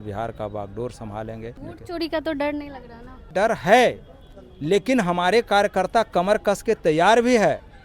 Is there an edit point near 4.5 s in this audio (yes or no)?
no